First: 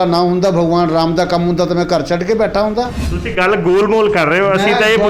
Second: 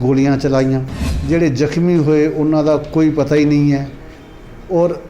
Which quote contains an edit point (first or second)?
second